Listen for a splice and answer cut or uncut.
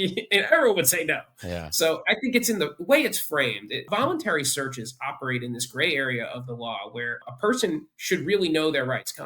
cut